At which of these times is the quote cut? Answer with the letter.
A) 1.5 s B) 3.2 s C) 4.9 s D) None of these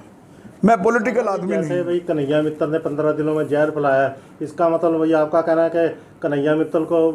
A